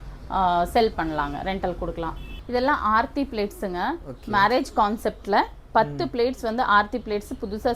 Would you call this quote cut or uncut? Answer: cut